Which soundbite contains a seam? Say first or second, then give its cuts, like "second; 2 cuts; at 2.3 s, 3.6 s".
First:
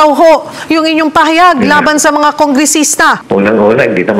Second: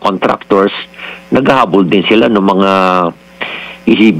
first; 1 cut; at 3.2 s